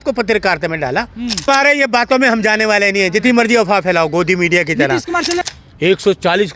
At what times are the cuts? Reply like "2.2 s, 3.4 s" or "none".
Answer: 1.5 s, 5.4 s

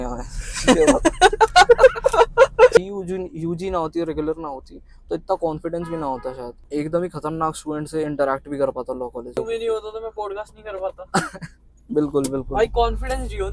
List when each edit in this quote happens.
2.8 s, 6.5 s, 9.4 s

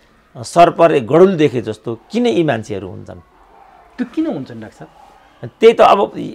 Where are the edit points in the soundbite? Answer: none

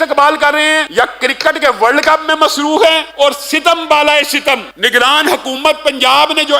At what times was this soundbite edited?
0.9 s, 3.1 s, 4.7 s

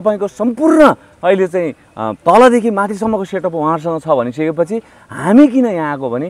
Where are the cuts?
none

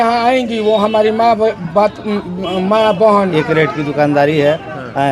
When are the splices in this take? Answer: 3.3 s

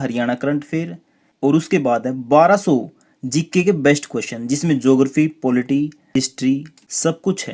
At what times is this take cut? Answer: none

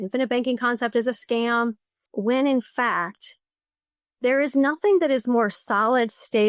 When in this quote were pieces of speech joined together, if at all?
2.1 s

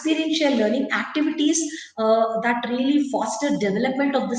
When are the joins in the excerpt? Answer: none

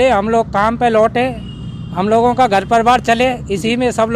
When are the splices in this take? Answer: none

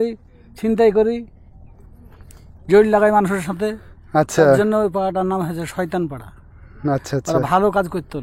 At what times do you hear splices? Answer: none

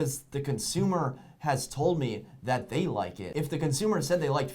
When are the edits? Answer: 3.2 s

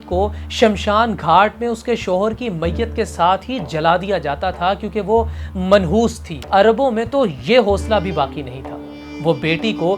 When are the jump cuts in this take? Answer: 6.4 s

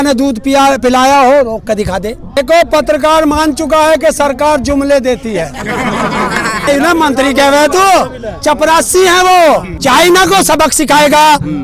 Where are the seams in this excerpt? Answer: 2.2 s, 6.7 s, 9.7 s

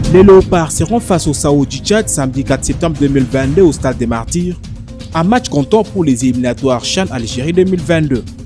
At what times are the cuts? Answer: none

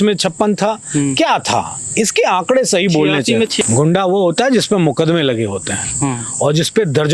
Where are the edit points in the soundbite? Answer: 3.6 s

